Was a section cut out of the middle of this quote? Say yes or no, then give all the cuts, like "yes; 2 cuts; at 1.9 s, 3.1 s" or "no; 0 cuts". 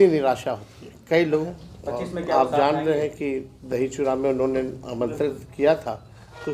yes; 1 cut; at 1.4 s